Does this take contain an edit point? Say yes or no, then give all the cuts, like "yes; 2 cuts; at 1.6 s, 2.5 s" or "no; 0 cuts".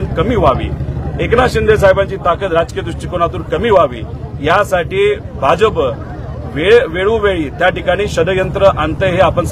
no; 0 cuts